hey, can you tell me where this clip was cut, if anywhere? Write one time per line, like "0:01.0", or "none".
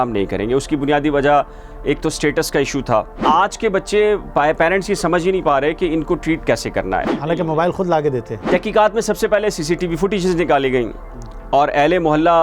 0:03.2
0:07.1
0:08.4